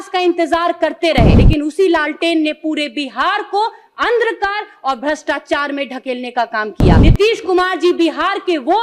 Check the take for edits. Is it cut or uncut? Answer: cut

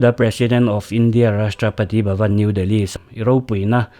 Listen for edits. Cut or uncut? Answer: cut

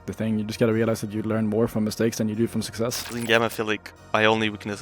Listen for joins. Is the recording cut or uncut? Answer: cut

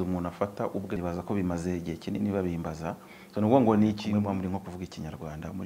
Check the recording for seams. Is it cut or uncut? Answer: cut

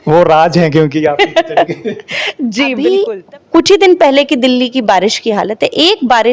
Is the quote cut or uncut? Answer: cut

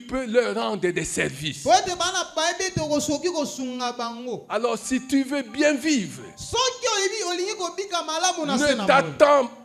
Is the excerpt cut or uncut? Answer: uncut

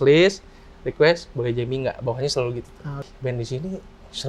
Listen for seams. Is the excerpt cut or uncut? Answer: cut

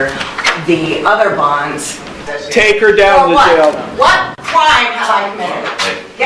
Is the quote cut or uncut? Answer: cut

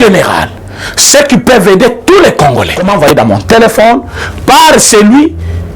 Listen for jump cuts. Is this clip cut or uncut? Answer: cut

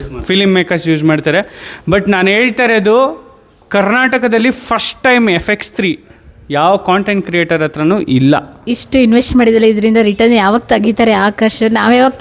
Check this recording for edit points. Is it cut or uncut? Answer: cut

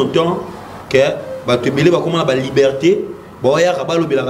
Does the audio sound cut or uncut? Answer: uncut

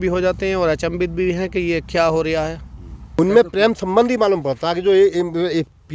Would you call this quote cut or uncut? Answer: cut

